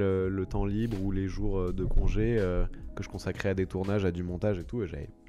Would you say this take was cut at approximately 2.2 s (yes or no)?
no